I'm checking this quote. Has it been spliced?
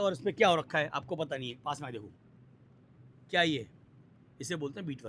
no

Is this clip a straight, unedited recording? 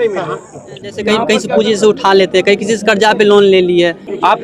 no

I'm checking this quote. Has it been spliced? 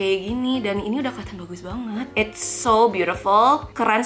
yes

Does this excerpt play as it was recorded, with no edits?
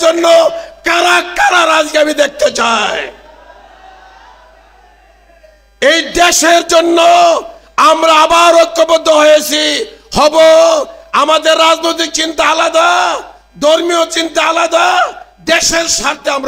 yes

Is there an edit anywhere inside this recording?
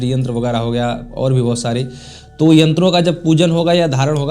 no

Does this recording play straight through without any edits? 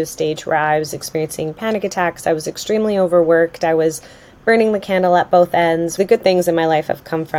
no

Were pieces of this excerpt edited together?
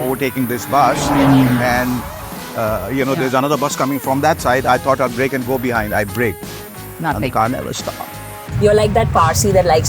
yes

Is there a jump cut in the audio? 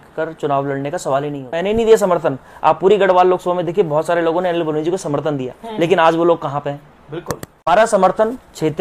yes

